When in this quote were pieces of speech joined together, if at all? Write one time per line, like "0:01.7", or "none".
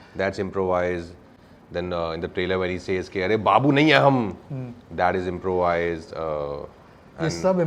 none